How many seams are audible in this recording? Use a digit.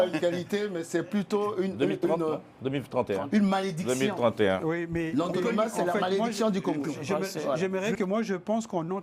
1